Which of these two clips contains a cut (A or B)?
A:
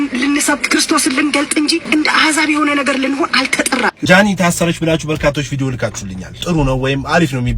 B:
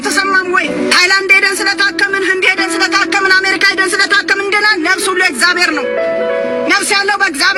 A